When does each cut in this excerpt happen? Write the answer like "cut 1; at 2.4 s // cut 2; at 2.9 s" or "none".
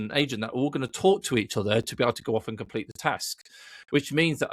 none